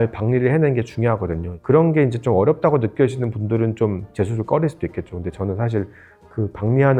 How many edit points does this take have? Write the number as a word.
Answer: zero